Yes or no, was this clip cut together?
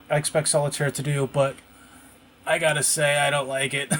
no